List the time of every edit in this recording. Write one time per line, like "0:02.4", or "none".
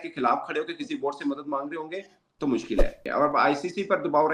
0:03.0

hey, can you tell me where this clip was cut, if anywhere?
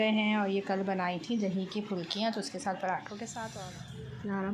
0:03.5

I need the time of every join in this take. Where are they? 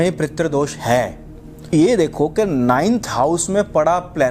0:01.7

